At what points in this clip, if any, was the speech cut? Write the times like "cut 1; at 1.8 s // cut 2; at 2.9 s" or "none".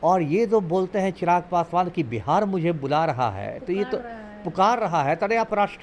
none